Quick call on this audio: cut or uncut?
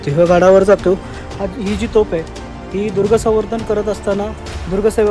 cut